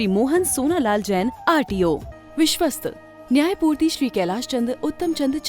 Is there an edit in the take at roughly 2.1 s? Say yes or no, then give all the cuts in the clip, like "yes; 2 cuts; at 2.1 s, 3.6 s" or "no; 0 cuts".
yes; 1 cut; at 2.1 s